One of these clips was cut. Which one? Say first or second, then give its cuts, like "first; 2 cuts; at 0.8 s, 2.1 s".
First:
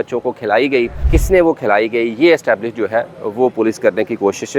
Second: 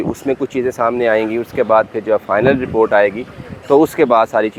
first; 1 cut; at 1.1 s